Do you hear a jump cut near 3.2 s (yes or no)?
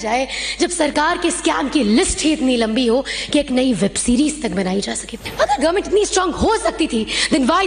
no